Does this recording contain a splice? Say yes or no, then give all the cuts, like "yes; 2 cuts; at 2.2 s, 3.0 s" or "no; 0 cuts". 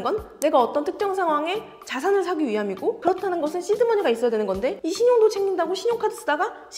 no; 0 cuts